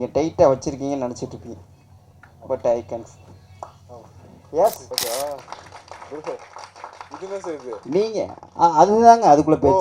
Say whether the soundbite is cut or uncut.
cut